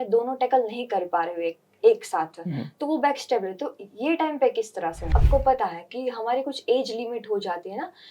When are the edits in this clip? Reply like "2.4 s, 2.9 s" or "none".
5.1 s